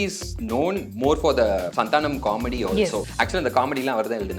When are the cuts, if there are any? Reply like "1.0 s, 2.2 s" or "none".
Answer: 0.9 s, 1.7 s, 3.1 s